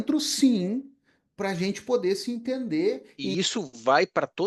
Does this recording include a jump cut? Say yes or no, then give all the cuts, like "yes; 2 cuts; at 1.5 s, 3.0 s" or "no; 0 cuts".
yes; 1 cut; at 3.1 s